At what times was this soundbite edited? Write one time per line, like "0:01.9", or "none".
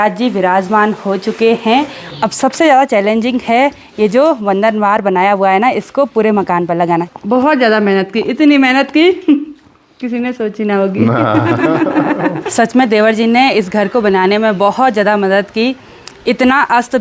0:02.0
0:07.1
0:12.4